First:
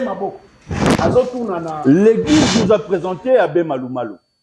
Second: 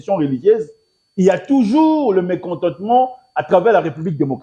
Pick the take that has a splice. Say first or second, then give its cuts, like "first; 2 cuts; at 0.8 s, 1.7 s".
first; 1 cut; at 1.7 s